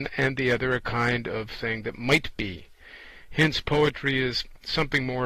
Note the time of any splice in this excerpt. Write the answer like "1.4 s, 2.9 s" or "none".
none